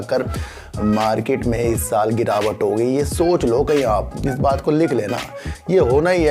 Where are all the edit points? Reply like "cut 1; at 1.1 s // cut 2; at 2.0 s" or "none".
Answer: none